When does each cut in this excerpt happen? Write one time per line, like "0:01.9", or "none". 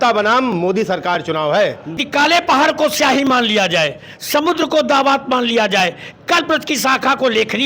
0:02.0